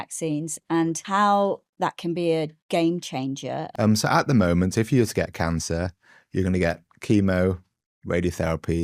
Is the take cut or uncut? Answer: cut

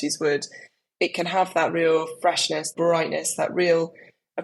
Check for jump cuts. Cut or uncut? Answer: cut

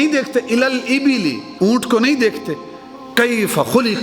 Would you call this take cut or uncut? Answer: cut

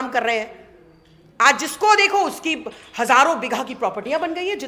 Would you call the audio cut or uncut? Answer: uncut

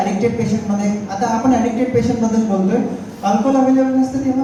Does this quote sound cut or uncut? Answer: uncut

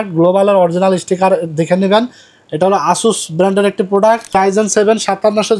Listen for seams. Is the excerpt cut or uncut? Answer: cut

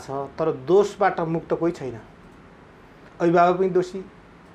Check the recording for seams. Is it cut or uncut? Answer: uncut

